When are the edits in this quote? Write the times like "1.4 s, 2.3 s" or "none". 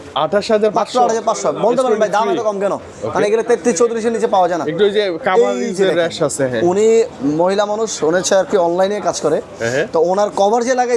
none